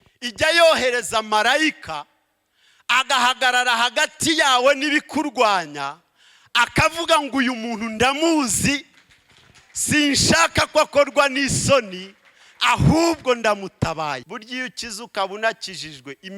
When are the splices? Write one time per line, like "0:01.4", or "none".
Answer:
0:14.2